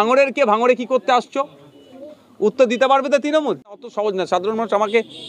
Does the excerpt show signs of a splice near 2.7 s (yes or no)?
no